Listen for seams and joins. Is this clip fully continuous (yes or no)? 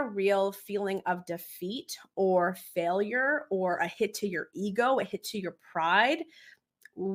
yes